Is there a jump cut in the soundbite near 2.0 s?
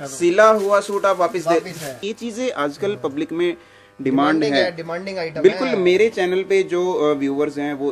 yes; 1 cut; at 2.0 s

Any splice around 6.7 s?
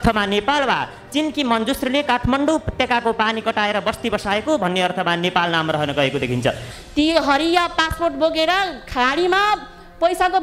yes; 1 cut; at 6.7 s

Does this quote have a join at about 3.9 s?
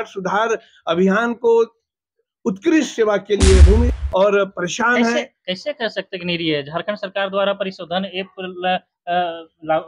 yes; 1 cut; at 3.9 s

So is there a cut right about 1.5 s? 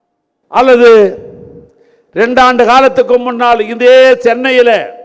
no; 0 cuts

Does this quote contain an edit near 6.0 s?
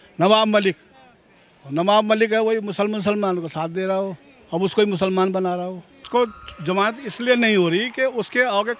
yes; 1 cut; at 6.0 s

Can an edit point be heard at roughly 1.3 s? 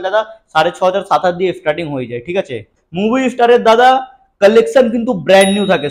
no; 1 cut; at 2.8 s

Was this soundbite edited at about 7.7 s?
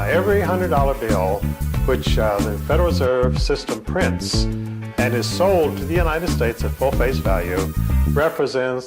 yes; 1 cut; at 7.7 s

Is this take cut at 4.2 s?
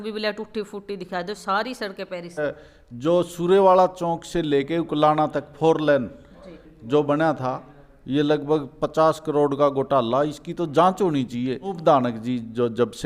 no; 2 cuts; at 2.4 s, 11.8 s

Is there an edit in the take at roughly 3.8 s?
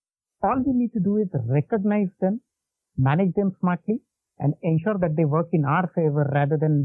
no; 0 cuts

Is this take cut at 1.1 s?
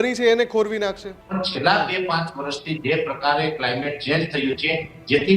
yes; 1 cut; at 1.1 s

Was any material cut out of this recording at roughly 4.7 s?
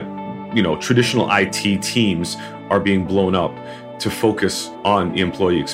yes; 1 cut; at 4.7 s

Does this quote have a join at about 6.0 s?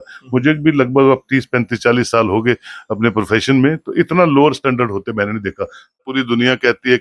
yes; 1 cut; at 6.0 s

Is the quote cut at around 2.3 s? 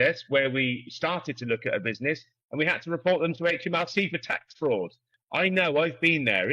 no; 1 cut; at 5.1 s

